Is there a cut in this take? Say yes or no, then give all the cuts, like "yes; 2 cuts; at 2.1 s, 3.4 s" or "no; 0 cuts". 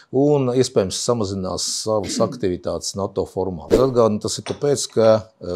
yes; 1 cut; at 3.7 s